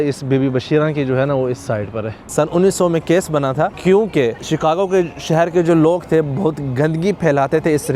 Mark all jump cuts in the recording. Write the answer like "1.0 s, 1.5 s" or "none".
2.3 s, 3.8 s, 4.4 s